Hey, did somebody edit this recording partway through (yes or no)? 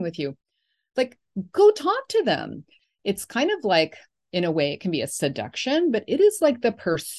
yes